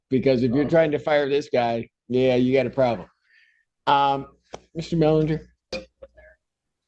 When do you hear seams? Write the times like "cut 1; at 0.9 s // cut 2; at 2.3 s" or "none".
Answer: cut 1; at 5.7 s